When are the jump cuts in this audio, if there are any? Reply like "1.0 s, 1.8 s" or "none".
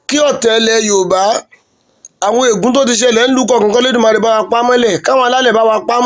none